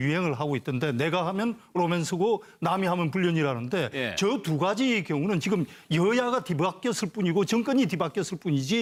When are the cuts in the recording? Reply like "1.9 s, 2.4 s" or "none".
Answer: none